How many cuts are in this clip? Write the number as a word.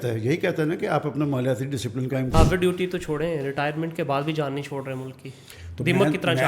one